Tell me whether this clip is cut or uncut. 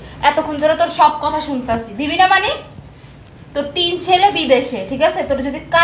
uncut